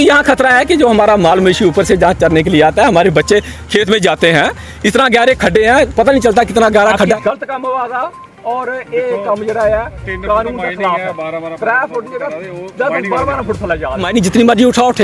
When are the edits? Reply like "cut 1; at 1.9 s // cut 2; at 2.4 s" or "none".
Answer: cut 1; at 7.1 s // cut 2; at 14.0 s